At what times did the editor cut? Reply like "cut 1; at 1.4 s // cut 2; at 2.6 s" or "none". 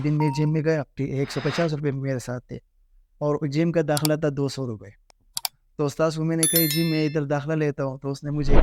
cut 1; at 0.9 s

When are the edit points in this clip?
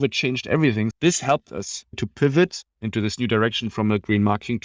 cut 1; at 0.9 s // cut 2; at 2.0 s

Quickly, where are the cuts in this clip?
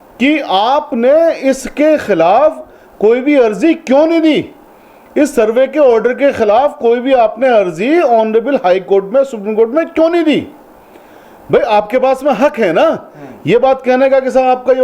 none

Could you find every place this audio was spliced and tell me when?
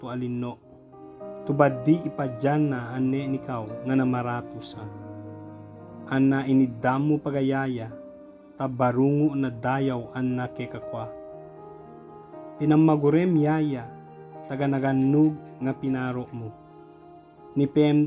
none

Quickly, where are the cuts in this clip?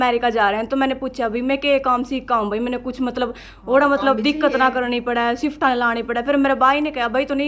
none

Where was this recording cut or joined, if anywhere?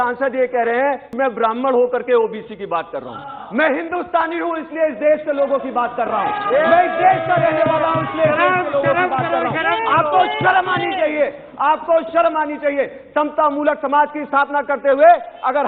cut 1; at 1.1 s

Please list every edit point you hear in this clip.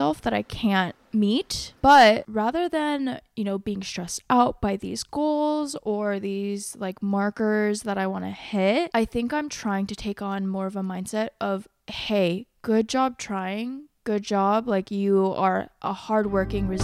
cut 1; at 1.0 s // cut 2; at 2.3 s // cut 3; at 8.9 s

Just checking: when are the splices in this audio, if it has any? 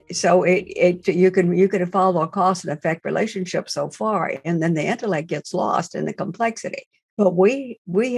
cut 1; at 1.0 s // cut 2; at 7.1 s

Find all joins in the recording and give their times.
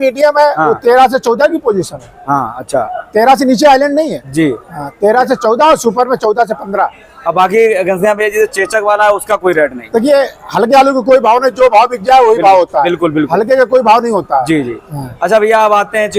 none

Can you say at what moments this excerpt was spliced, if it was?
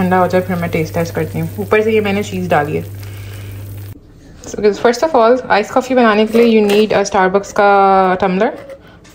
cut 1; at 3.8 s

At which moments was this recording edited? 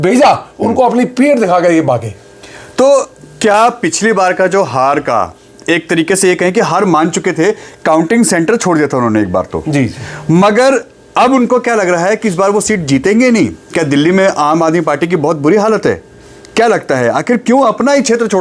none

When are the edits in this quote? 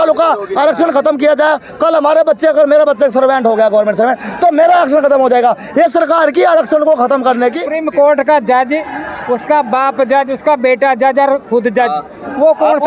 cut 1; at 7.6 s

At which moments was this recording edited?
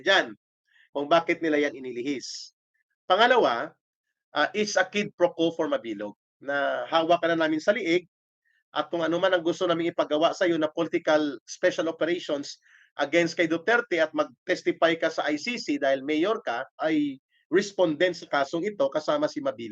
cut 1; at 16.8 s

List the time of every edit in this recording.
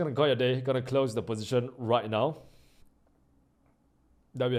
none

